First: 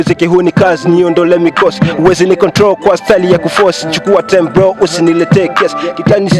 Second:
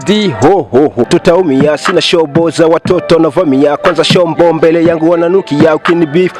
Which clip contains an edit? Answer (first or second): second